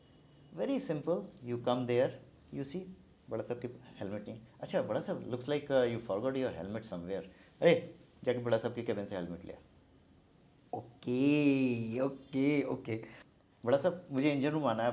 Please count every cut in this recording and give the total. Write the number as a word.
one